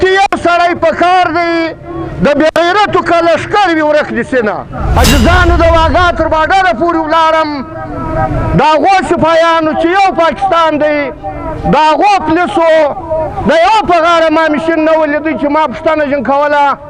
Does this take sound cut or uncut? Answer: cut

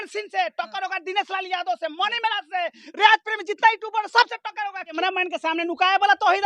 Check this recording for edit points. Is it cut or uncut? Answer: cut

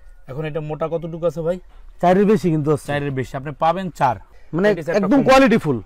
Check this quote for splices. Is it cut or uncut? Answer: uncut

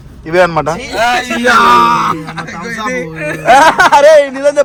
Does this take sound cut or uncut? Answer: uncut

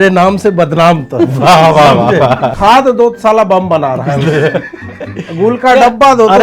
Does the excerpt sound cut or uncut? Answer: cut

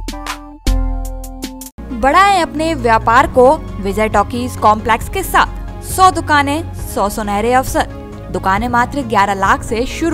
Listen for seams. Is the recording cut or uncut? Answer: uncut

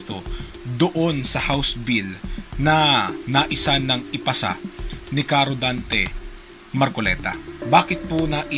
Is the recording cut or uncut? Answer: cut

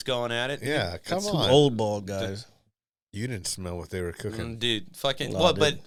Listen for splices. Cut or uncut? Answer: uncut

